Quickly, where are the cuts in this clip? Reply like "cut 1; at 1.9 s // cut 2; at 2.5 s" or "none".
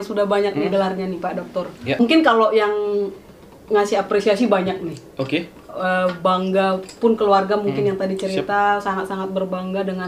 cut 1; at 2.0 s